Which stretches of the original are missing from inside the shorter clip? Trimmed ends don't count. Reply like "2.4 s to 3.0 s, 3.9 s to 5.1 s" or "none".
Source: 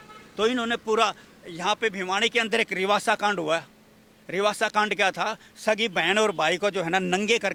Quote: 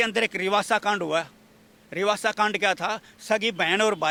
none